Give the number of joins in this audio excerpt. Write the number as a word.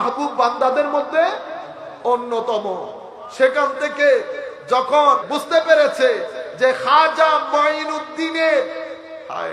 one